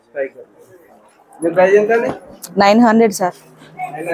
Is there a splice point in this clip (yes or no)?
no